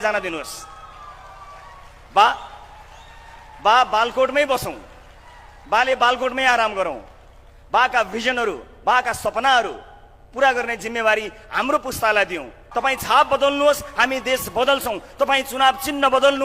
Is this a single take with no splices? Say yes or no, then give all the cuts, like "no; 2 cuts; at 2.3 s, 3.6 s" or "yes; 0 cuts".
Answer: no; 1 cut; at 12.6 s